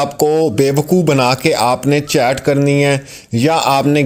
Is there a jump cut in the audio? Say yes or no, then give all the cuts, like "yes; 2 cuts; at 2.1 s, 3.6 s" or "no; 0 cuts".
no; 0 cuts